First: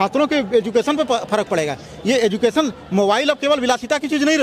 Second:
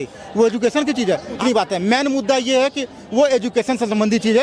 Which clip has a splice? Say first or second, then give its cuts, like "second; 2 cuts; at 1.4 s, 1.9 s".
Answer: second; 1 cut; at 1.4 s